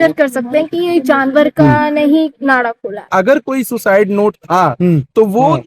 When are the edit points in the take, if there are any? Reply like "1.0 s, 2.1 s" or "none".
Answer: 3.0 s